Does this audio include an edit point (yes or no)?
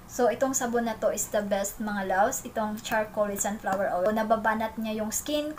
yes